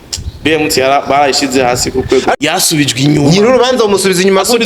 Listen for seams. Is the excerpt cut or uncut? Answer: cut